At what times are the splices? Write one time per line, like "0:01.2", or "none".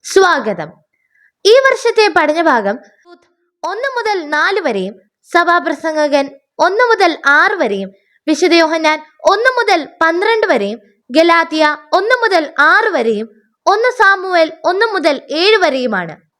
0:03.2